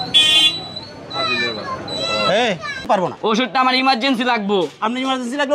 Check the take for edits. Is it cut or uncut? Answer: cut